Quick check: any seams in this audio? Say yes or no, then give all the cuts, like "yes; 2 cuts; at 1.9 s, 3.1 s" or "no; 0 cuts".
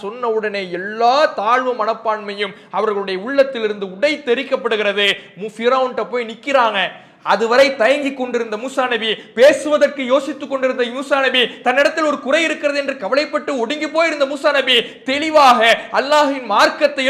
no; 0 cuts